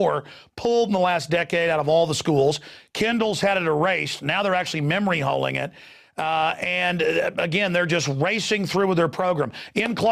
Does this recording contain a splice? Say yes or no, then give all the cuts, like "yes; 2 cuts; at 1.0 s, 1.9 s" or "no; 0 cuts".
no; 0 cuts